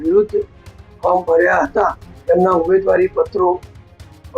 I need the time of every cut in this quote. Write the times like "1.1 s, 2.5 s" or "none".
2.1 s